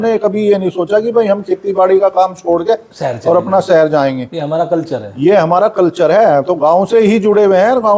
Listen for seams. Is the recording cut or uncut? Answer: uncut